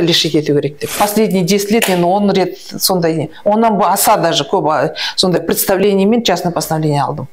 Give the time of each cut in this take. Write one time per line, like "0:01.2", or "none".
0:00.9